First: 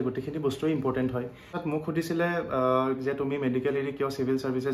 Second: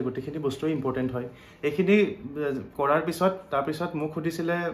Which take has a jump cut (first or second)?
first